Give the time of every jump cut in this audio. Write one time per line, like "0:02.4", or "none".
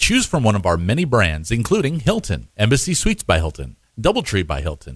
0:02.0